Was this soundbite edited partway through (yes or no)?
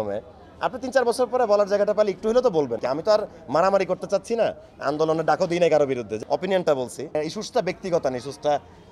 yes